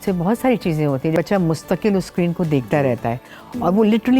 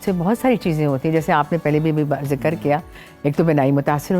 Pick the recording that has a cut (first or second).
first